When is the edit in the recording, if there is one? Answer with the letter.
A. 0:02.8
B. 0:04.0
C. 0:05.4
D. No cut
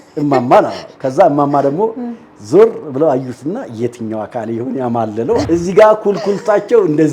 C